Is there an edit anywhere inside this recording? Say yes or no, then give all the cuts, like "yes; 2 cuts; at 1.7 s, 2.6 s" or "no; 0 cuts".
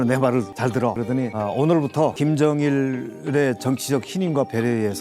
yes; 2 cuts; at 1.0 s, 2.1 s